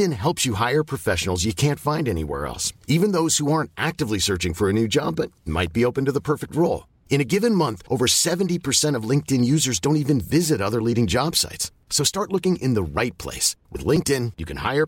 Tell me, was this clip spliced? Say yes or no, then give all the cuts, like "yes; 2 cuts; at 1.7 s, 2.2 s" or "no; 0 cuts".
no; 0 cuts